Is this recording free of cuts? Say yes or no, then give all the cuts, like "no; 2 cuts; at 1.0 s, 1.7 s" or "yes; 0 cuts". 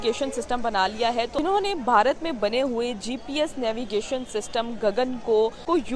no; 1 cut; at 1.3 s